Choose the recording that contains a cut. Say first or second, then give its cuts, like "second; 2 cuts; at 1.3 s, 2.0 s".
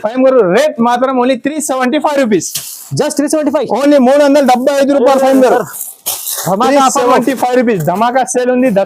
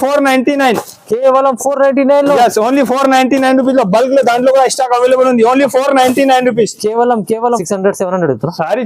second; 1 cut; at 7.6 s